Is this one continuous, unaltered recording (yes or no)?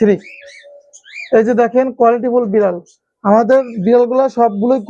yes